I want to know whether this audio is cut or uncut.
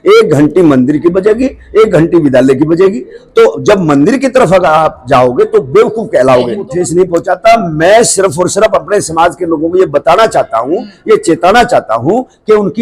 cut